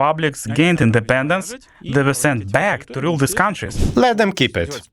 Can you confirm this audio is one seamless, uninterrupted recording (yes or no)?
no